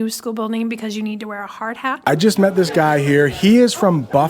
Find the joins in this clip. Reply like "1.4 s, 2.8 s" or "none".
2.0 s